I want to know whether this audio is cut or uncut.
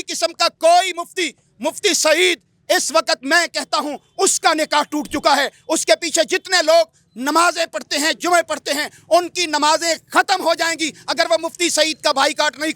uncut